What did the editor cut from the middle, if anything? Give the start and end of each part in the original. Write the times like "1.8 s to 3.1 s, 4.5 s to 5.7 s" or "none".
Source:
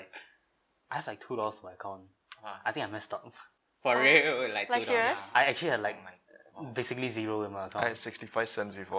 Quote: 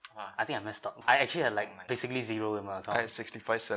3.2 s to 5.2 s, 6.0 s to 6.6 s